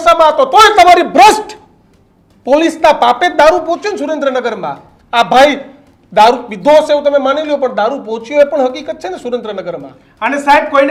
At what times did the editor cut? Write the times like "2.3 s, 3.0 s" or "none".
none